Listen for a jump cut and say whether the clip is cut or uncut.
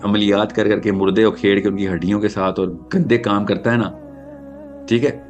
uncut